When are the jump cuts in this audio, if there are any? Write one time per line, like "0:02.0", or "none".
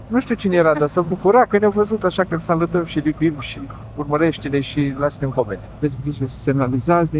0:05.8